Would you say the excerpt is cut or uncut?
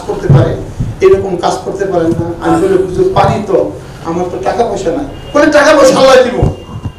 uncut